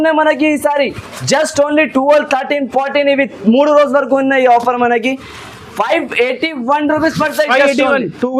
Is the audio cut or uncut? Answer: uncut